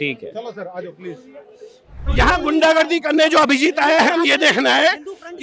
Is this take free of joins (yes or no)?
no